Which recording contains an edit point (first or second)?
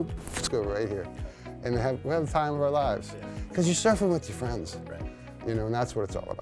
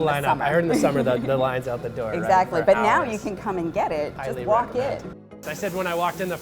second